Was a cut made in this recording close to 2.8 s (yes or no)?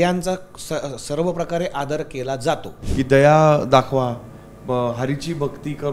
yes